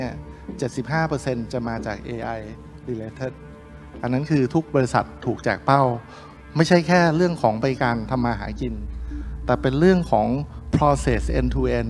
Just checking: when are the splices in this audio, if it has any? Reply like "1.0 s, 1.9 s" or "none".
none